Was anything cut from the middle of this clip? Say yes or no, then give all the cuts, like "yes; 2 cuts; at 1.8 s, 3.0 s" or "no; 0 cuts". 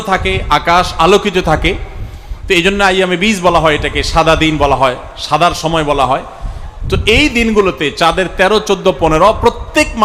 no; 0 cuts